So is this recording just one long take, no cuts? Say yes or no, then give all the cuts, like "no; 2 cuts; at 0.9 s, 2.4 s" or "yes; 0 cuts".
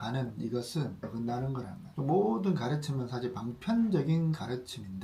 yes; 0 cuts